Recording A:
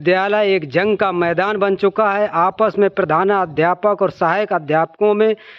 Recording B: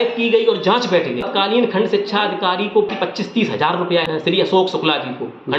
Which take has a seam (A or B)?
B